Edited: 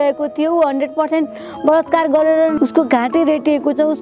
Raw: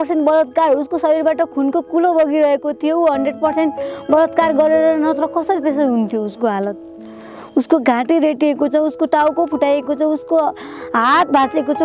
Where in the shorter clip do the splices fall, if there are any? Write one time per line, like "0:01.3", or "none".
0:02.6